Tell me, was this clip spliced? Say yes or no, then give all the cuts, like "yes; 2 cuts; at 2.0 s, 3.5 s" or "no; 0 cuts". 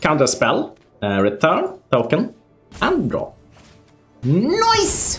yes; 1 cut; at 4.2 s